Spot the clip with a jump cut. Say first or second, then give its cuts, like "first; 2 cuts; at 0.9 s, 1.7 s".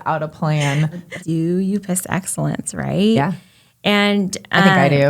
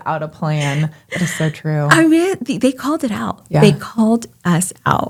first; 1 cut; at 1.0 s